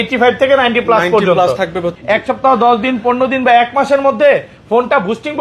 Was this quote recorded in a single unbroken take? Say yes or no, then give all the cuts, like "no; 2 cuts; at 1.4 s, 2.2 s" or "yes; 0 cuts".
no; 1 cut; at 1.9 s